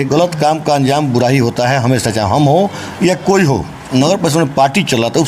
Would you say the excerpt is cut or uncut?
cut